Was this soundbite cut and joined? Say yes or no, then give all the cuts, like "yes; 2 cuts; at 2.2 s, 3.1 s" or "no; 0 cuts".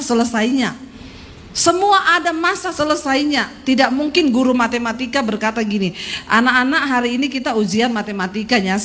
no; 0 cuts